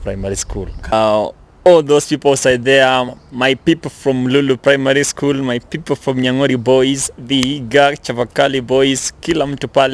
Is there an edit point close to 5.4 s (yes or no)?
no